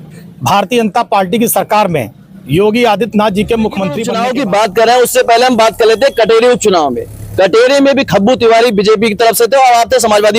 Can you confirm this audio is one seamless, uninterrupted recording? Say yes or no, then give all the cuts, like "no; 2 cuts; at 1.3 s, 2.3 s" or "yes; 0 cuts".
no; 1 cut; at 4.1 s